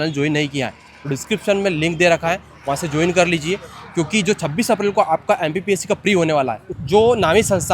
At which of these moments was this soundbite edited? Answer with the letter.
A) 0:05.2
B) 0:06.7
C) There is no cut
B